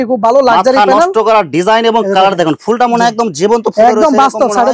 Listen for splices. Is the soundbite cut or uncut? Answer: uncut